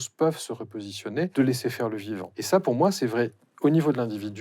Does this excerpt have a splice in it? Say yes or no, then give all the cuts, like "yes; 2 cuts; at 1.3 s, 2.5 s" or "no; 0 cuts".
yes; 2 cuts; at 1.3 s, 2.3 s